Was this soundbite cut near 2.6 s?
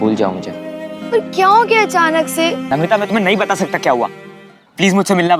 yes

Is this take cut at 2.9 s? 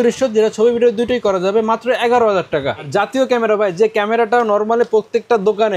yes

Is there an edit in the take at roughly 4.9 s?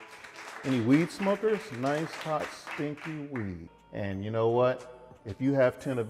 no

